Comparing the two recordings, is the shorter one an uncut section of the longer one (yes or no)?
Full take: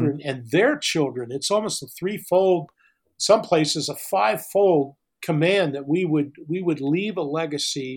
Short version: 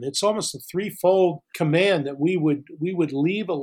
no